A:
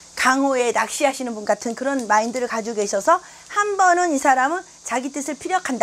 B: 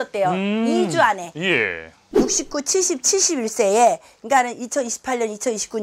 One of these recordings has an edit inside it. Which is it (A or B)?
B